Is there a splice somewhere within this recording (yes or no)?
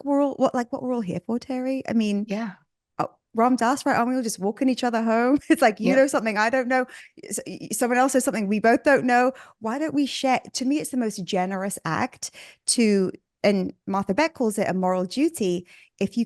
no